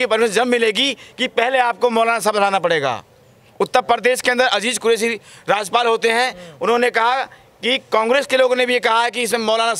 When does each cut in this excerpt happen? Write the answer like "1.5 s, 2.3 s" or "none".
none